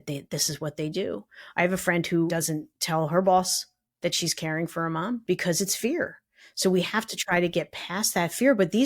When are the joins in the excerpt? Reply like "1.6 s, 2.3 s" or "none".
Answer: 2.3 s, 5.2 s